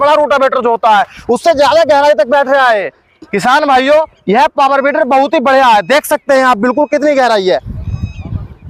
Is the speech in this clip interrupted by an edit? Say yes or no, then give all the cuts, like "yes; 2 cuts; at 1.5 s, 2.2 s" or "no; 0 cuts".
no; 0 cuts